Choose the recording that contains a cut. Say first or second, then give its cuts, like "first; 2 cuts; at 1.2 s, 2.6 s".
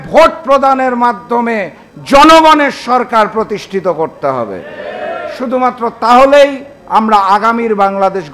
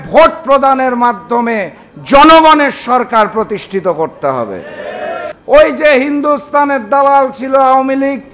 second; 1 cut; at 5.3 s